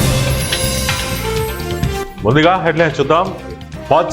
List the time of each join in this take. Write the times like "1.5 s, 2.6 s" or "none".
2.0 s